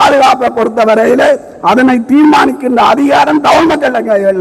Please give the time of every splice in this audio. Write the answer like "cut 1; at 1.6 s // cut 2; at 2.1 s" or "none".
none